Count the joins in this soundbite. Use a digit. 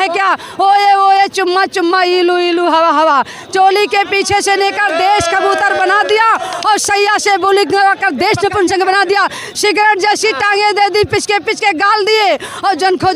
0